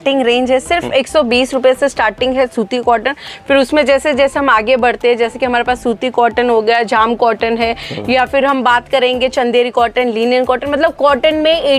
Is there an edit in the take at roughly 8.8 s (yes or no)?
no